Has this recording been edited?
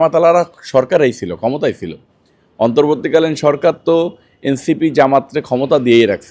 no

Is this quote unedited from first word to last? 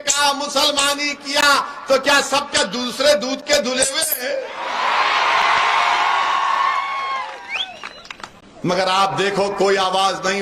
yes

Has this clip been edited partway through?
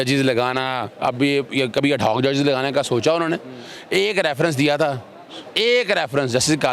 no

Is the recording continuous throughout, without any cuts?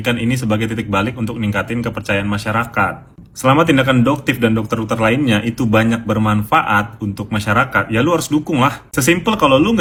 yes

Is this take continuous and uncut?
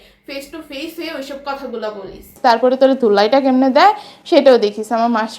no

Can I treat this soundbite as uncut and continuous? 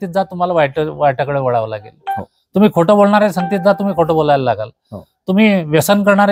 yes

